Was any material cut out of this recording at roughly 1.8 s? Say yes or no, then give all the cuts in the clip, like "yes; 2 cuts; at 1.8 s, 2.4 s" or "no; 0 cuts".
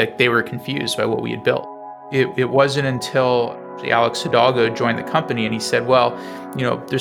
yes; 1 cut; at 1.8 s